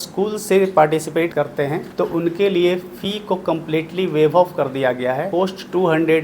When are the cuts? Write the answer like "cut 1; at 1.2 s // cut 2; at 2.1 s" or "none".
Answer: cut 1; at 1.4 s // cut 2; at 5.3 s